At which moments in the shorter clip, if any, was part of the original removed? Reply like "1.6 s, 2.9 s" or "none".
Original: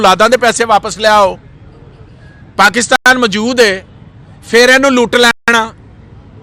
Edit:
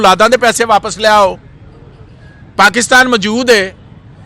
3.0 s